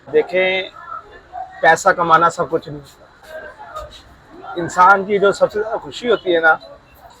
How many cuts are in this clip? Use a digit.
1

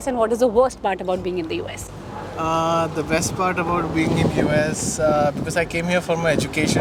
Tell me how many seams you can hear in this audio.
0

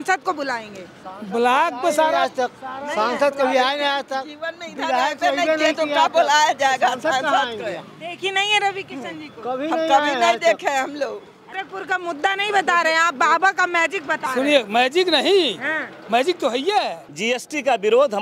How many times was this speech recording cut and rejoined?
2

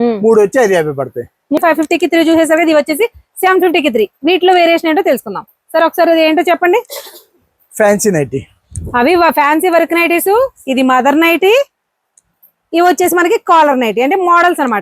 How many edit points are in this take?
1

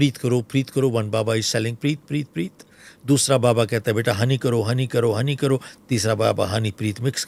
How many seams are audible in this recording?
0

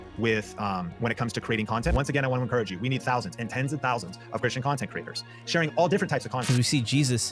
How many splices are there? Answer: 2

